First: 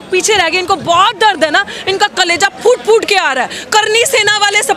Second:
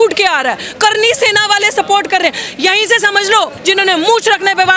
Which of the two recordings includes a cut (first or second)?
second